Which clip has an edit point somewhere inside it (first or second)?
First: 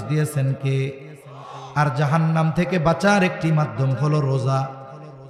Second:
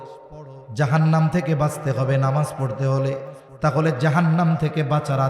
second